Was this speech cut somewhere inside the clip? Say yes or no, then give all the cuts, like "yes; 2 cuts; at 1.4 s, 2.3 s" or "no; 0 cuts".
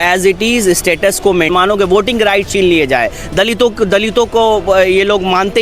yes; 1 cut; at 1.5 s